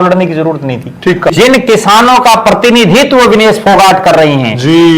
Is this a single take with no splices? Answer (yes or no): no